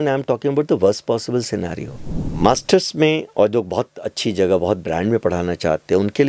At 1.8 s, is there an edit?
yes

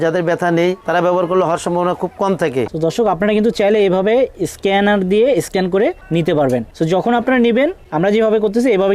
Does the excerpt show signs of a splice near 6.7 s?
yes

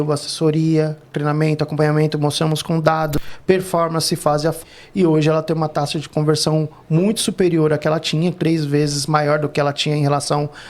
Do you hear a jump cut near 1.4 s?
no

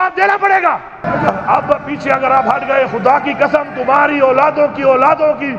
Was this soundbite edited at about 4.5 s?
no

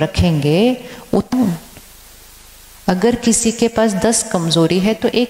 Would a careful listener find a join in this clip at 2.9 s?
no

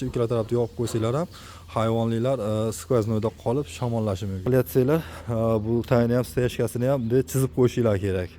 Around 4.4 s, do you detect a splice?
yes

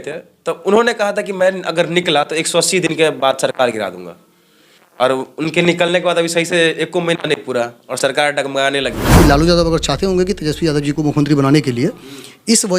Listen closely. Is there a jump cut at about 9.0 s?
yes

